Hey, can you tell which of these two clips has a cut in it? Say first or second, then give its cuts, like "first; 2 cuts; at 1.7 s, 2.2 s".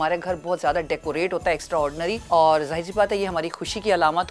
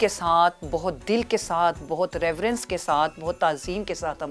first; 1 cut; at 2.2 s